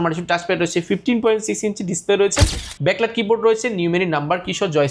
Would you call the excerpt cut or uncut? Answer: cut